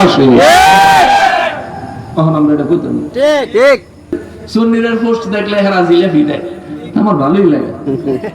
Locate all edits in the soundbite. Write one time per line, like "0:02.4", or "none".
0:04.3